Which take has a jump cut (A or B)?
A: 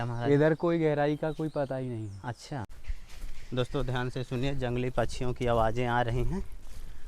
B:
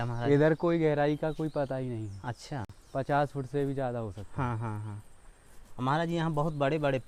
A